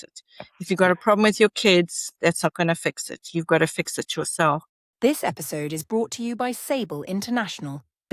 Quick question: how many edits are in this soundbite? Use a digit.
1